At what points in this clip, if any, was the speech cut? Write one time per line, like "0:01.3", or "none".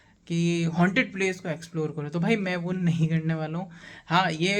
none

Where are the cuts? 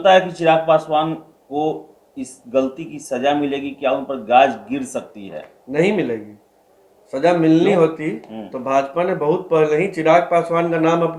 none

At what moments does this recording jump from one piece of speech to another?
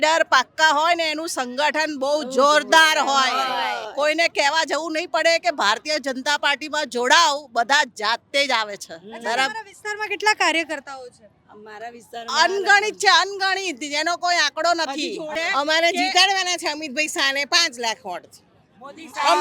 0:15.3

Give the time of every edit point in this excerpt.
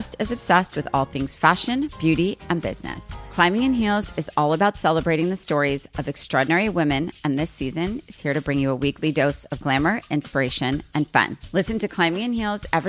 none

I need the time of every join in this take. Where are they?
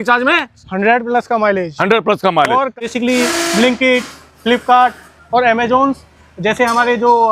0:02.9

